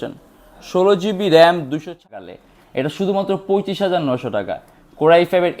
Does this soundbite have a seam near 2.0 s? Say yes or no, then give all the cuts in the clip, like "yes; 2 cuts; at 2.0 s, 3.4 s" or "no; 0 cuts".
yes; 1 cut; at 2.0 s